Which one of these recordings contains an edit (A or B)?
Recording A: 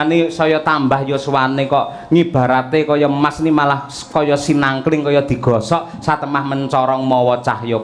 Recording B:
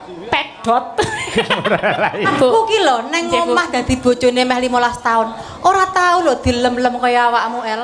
B